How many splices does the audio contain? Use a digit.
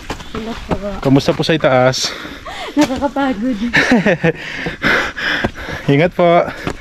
0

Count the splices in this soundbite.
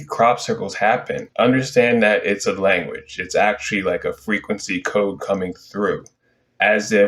0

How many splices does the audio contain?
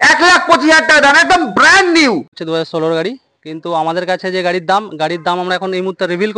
1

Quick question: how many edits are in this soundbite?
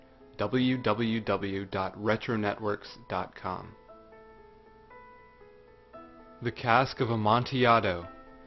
1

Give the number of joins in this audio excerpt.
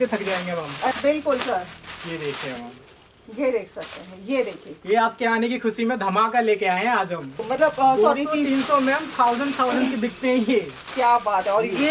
2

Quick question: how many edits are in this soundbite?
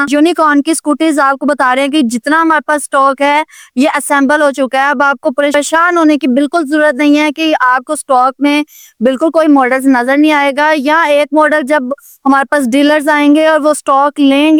0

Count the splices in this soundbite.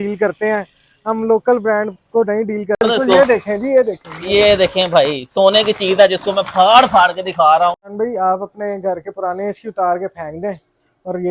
2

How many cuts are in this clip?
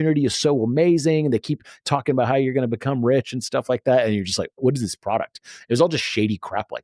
1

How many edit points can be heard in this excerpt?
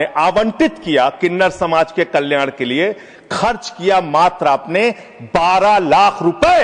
0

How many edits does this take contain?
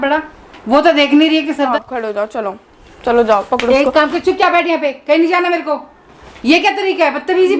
1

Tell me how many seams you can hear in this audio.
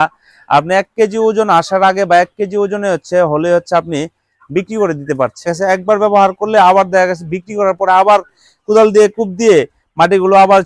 1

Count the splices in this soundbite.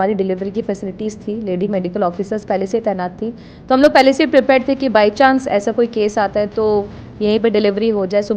0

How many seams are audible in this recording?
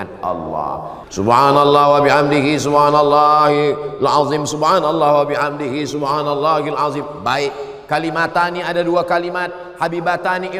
1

